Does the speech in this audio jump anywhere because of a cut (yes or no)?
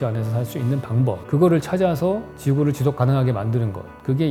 no